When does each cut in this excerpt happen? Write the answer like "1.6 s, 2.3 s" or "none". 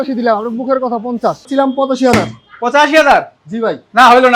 1.4 s